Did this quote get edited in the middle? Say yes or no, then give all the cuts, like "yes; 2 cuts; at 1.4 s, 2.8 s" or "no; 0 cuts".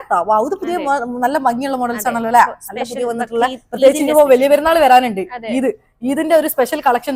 no; 0 cuts